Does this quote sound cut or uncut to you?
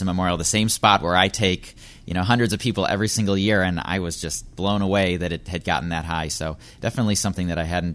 uncut